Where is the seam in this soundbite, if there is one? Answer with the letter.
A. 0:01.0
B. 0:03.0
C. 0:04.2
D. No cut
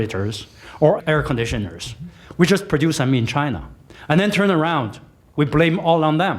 A